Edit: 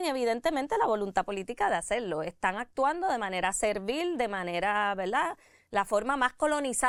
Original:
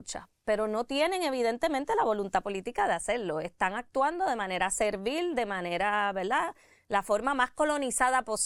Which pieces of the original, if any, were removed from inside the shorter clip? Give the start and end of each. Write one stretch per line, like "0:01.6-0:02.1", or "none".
none